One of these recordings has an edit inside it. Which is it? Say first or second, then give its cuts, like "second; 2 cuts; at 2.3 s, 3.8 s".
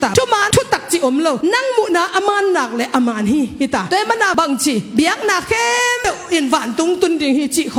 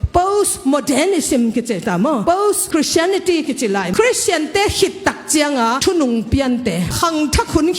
second; 2 cuts; at 3.9 s, 6.9 s